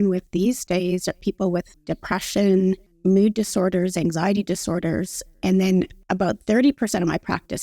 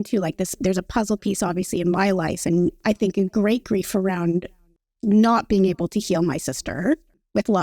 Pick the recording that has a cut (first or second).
first